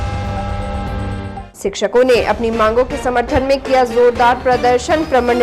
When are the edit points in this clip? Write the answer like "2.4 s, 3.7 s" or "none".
1.5 s

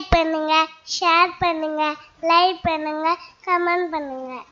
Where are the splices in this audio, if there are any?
none

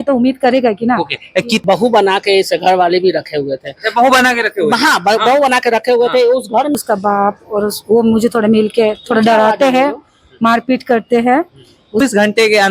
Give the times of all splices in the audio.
1.6 s, 6.7 s, 12.0 s

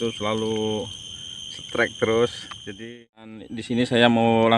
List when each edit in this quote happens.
3.5 s

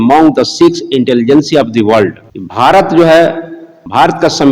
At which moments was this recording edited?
none

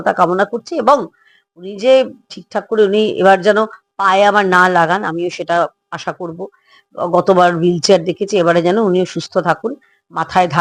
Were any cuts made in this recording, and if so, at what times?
none

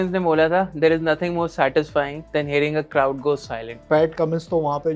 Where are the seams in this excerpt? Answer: 2.2 s, 3.8 s

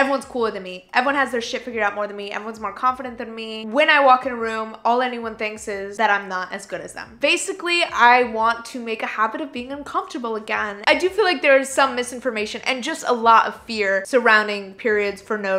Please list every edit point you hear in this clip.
5.9 s, 7.0 s, 10.7 s

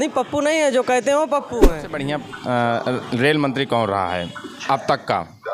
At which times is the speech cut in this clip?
1.6 s

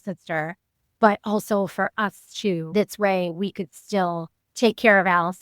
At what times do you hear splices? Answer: 2.7 s

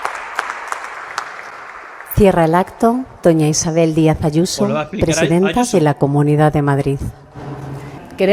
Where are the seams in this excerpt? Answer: none

